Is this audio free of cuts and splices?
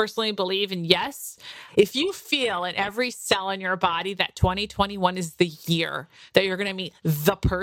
no; 1 cut; at 1.6 s

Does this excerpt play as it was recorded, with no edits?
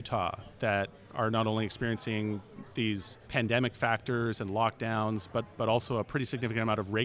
yes; 0 cuts

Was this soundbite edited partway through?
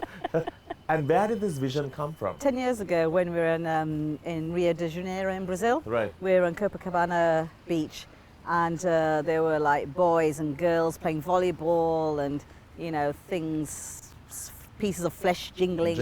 yes; 1 cut; at 2.4 s

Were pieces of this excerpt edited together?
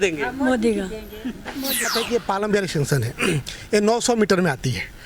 yes; 1 cut; at 1.9 s

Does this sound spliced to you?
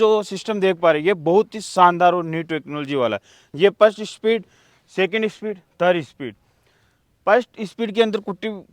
yes; 1 cut; at 3.4 s

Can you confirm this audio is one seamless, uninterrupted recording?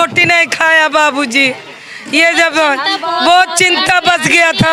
yes; 0 cuts

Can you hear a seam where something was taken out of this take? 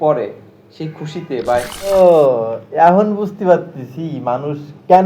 yes; 1 cut; at 1.9 s

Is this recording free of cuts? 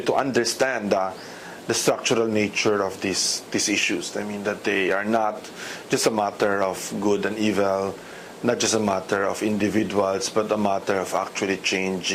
no; 1 cut; at 5.5 s

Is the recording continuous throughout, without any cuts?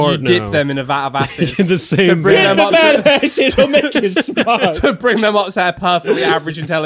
yes; 0 cuts

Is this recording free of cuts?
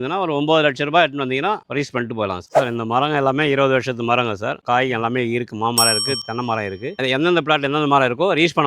no; 1 cut; at 2.4 s

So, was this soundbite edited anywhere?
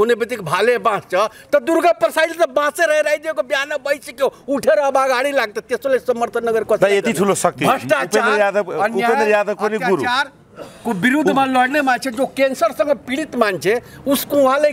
no; 0 cuts

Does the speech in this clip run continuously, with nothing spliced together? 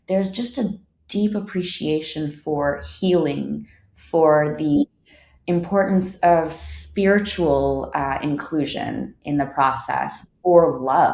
yes; 0 cuts

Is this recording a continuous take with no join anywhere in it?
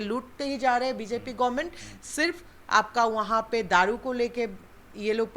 yes; 0 cuts

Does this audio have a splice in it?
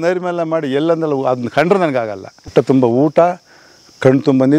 yes; 1 cut; at 2.5 s

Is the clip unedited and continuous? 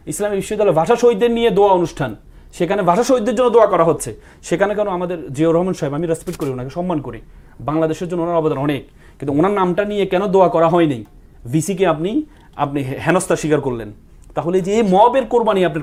yes; 0 cuts

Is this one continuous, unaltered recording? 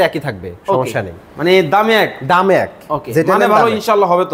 yes; 0 cuts

